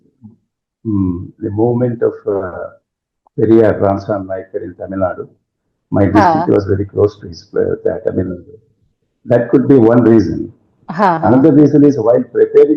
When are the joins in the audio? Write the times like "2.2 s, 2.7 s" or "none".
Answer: none